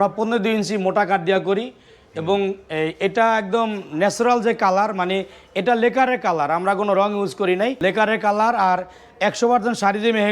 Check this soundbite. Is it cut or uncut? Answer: cut